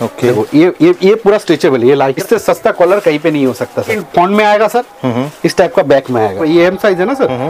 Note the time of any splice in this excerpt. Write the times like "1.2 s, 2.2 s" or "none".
2.2 s, 4.0 s, 6.4 s